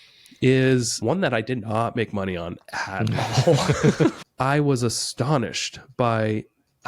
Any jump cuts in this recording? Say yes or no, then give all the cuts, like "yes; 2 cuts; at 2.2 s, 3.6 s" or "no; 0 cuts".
yes; 2 cuts; at 1.0 s, 4.2 s